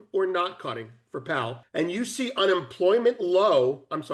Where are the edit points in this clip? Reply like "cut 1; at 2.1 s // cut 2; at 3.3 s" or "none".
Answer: cut 1; at 1.6 s

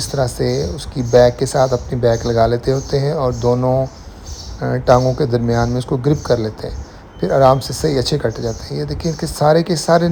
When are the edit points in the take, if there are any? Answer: none

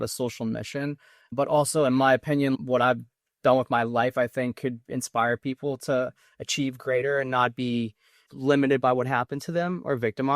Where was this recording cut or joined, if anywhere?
none

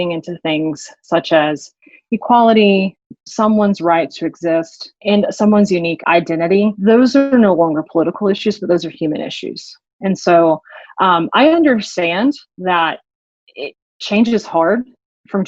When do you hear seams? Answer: cut 1; at 3.1 s // cut 2; at 5.0 s // cut 3; at 6.2 s

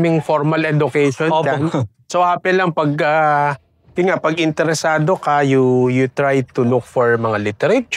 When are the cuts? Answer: none

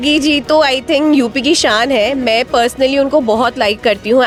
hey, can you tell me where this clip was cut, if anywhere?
none

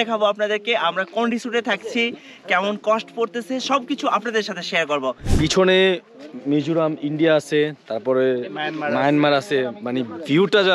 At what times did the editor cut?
cut 1; at 5.2 s

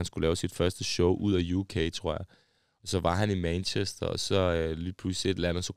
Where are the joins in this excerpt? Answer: none

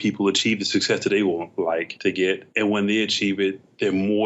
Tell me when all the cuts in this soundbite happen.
cut 1; at 1.9 s

